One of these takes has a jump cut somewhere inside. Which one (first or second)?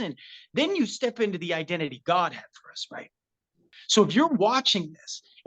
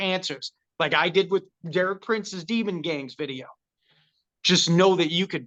first